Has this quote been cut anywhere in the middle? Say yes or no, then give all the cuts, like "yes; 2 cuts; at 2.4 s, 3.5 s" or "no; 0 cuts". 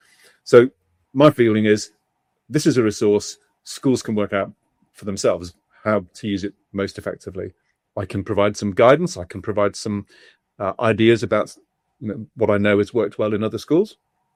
no; 0 cuts